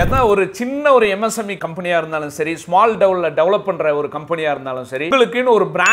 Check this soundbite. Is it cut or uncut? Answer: cut